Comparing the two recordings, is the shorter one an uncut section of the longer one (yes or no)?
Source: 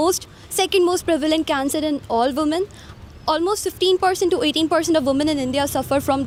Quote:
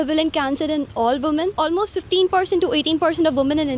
no